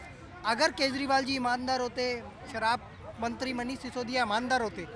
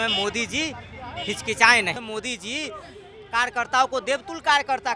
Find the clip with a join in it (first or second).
second